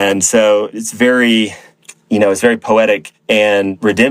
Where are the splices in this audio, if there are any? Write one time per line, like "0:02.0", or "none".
none